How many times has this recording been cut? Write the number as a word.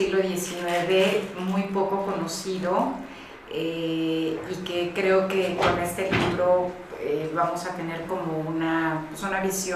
zero